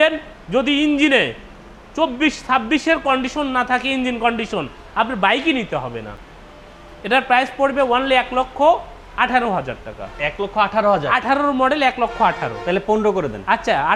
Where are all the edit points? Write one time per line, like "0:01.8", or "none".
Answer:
none